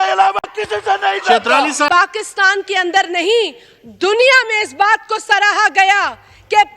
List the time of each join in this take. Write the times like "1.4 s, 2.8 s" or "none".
1.9 s